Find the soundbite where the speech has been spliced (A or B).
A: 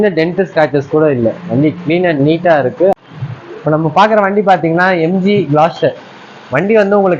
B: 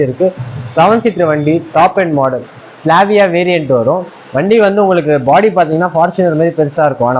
A